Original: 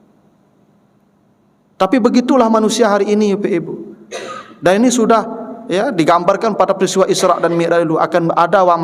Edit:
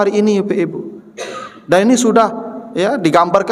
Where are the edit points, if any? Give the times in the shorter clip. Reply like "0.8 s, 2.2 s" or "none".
none